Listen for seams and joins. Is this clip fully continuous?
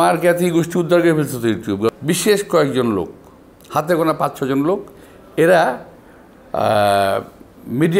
no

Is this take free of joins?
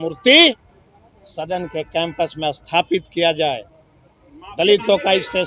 yes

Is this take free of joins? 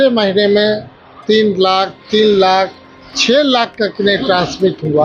yes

